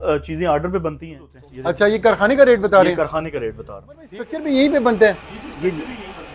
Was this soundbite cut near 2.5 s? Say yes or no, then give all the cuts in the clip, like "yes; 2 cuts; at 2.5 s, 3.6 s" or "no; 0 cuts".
no; 2 cuts; at 1.3 s, 4.2 s